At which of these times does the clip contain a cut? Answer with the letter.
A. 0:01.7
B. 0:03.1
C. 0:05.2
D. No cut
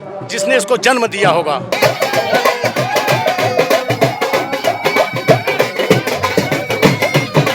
D